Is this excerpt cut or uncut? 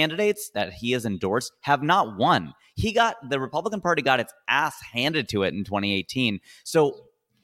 uncut